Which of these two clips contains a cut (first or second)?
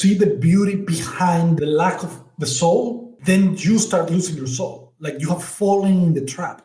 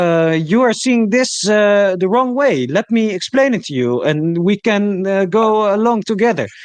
first